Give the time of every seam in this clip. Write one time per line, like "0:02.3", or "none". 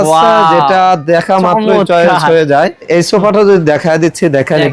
0:02.9